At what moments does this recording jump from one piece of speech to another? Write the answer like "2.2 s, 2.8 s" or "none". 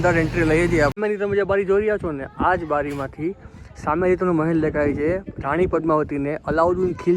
1.0 s